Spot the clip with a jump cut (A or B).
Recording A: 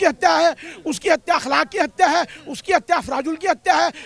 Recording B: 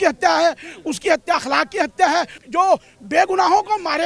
B